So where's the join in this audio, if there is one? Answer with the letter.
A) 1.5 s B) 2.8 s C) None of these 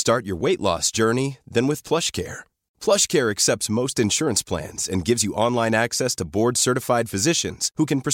C